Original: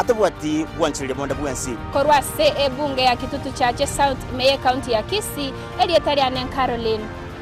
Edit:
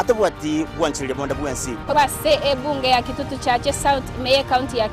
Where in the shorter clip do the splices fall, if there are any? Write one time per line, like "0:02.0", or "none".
0:01.9